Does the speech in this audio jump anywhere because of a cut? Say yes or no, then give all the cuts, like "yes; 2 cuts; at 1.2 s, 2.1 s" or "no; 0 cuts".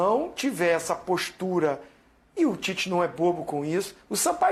no; 0 cuts